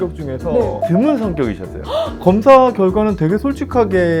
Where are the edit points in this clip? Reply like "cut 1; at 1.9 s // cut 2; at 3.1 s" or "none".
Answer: cut 1; at 0.8 s // cut 2; at 2.1 s